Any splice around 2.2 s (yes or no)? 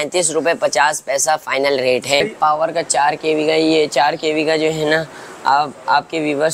yes